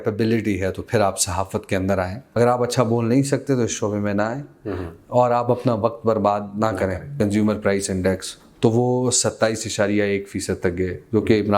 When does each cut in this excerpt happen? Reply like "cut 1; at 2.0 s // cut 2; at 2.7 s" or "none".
cut 1; at 2.2 s // cut 2; at 7.2 s